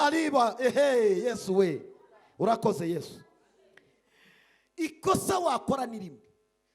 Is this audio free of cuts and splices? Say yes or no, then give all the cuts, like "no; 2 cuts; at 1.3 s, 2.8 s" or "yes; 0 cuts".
no; 1 cut; at 4.0 s